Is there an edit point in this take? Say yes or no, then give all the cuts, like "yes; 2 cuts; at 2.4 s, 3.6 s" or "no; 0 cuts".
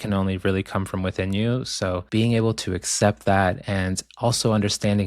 yes; 1 cut; at 2.0 s